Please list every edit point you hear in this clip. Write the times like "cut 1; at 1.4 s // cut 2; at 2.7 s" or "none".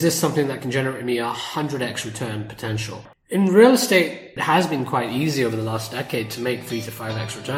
cut 1; at 3.1 s // cut 2; at 4.3 s